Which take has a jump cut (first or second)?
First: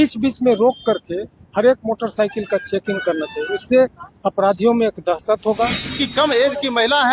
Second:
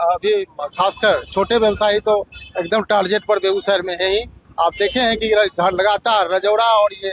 first